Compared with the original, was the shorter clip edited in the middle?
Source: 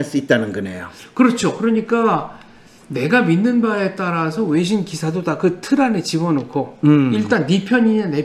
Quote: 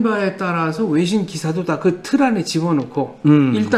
no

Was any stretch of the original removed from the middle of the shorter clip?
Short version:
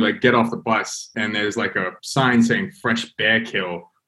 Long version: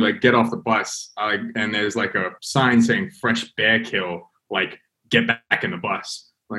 yes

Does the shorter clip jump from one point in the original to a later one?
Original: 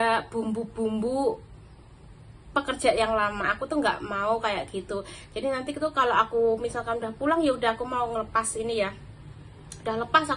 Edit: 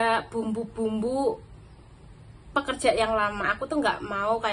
no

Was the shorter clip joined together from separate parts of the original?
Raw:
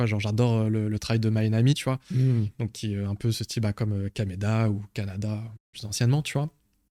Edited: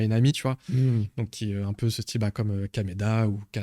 no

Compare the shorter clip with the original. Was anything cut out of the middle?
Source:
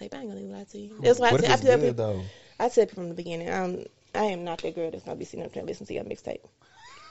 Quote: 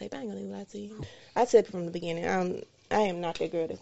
yes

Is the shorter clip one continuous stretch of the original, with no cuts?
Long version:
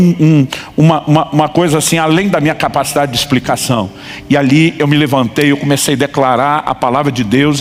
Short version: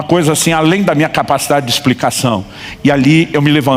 yes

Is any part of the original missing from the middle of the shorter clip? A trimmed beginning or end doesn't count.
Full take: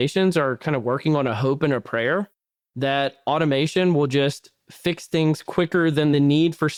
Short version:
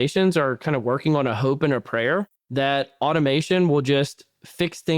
yes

